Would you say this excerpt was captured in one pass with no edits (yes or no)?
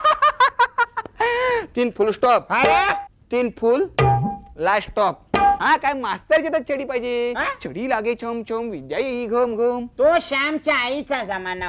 no